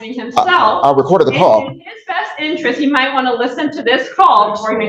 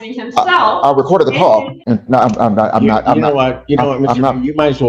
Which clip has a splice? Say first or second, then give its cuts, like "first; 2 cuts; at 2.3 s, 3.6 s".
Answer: second; 1 cut; at 1.7 s